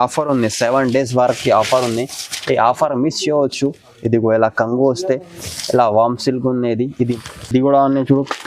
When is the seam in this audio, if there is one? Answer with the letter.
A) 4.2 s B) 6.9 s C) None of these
B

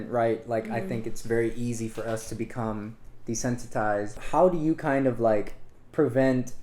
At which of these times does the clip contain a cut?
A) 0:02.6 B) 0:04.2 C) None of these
B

